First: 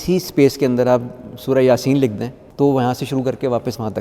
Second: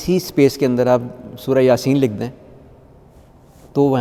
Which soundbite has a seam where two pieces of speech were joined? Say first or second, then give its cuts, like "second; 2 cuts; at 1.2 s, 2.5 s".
first; 1 cut; at 2.4 s